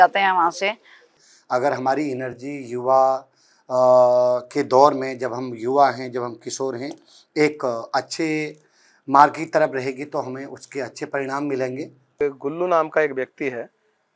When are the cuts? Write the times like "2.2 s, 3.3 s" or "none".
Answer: 1.1 s, 12.2 s